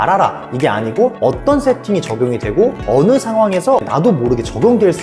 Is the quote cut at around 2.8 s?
yes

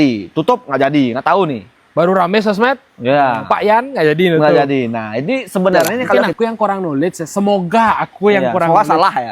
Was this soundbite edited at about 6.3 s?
yes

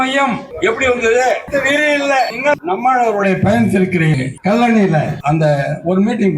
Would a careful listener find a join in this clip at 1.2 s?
no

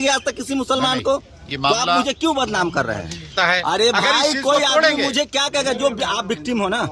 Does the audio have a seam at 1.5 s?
no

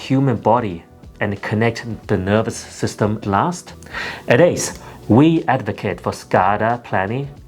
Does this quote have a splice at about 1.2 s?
no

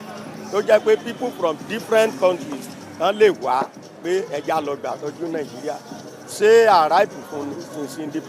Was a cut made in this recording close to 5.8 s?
no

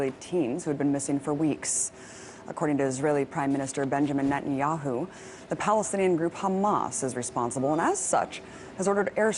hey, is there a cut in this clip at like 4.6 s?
yes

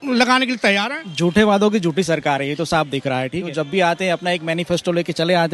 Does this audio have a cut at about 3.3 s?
yes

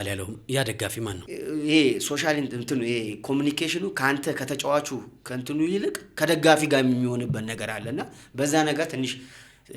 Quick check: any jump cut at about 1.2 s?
yes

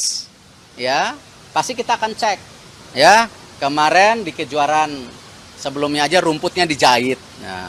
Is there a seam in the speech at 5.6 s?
no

